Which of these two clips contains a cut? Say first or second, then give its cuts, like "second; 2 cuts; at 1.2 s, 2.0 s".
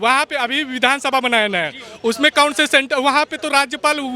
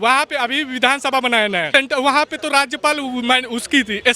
second; 1 cut; at 1.7 s